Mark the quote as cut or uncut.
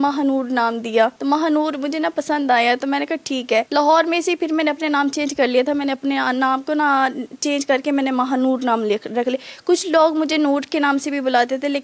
uncut